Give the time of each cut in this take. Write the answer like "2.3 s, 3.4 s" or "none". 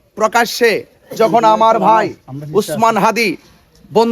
none